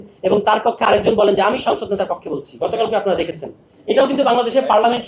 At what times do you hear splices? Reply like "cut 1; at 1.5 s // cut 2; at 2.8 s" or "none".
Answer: none